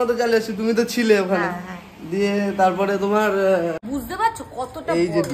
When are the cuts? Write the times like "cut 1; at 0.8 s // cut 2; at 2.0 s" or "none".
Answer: cut 1; at 3.8 s